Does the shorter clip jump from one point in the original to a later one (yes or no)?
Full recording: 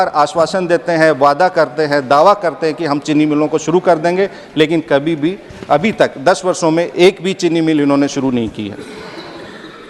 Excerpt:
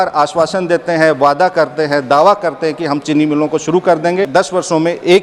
yes